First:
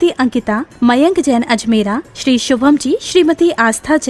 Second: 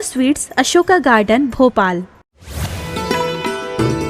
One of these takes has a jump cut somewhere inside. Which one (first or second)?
second